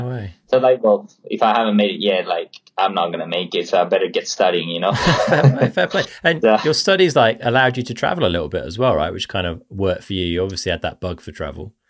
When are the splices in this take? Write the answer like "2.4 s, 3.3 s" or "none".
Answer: none